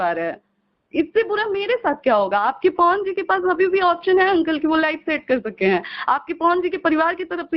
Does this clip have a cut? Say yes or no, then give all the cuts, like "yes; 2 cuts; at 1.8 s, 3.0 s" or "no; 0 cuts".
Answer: no; 0 cuts